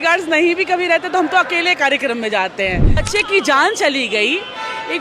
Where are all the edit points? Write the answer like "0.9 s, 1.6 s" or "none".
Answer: 3.1 s

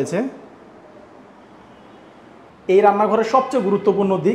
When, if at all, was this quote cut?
2.5 s

